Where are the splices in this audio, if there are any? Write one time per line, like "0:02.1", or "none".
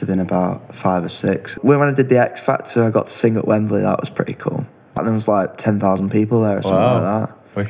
0:01.5
0:05.0